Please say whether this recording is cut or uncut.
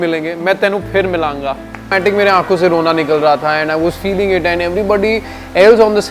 cut